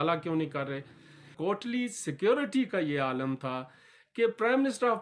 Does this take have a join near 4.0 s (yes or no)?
no